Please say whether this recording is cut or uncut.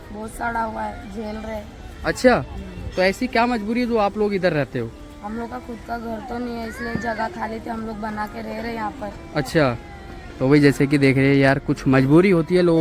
uncut